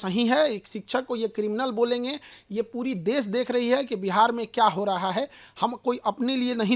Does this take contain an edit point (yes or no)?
no